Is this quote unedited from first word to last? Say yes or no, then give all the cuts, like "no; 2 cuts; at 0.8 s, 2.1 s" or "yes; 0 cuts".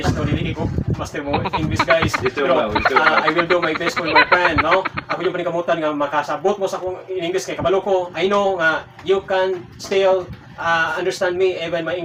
yes; 0 cuts